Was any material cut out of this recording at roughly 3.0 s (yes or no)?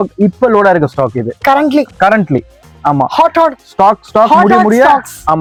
no